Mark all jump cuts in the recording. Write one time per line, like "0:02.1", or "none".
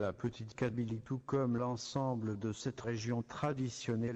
0:00.9